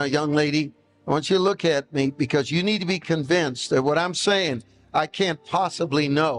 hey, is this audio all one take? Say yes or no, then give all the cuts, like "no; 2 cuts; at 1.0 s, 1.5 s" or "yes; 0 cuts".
yes; 0 cuts